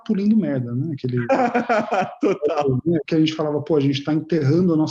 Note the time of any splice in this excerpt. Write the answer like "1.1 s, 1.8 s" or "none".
3.1 s